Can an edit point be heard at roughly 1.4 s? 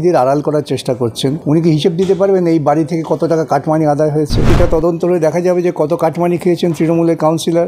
yes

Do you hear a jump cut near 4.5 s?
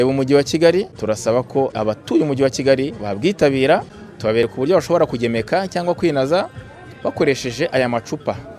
yes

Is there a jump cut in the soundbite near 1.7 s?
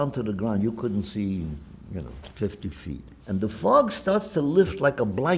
no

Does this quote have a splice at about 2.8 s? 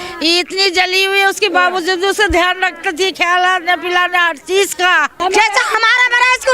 no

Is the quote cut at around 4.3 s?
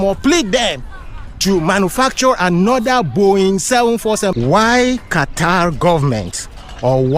yes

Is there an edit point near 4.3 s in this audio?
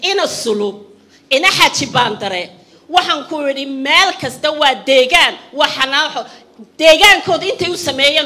no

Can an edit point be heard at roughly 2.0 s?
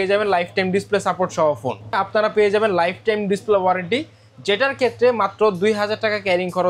yes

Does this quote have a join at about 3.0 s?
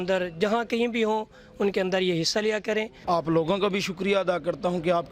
yes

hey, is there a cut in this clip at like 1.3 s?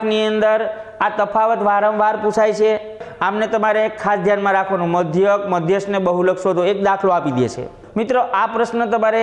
no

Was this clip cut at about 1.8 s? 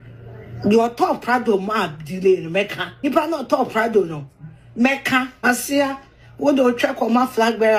no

